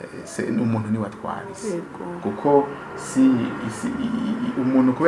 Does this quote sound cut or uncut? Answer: uncut